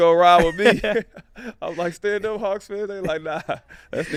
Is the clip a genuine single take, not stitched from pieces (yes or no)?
yes